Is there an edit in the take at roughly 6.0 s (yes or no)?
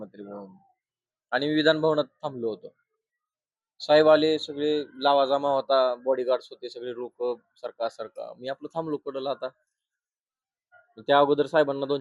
no